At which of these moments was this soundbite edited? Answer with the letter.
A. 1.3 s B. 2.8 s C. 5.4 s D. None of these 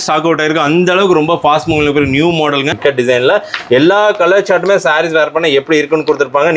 B